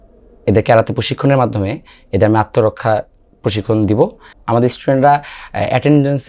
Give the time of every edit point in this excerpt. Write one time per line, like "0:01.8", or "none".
0:04.3